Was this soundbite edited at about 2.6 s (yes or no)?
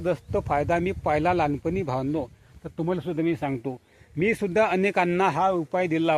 no